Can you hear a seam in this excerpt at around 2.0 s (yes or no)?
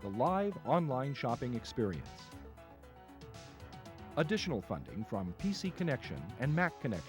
yes